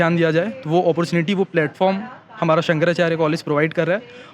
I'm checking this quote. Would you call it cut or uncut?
uncut